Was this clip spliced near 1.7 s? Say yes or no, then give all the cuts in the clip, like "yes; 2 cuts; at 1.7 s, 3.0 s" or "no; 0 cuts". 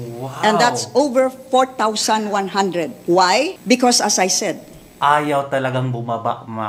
no; 2 cuts; at 3.0 s, 3.6 s